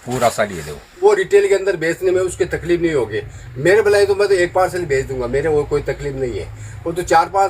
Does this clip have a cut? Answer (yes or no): yes